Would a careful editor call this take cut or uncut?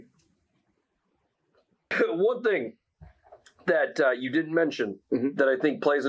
cut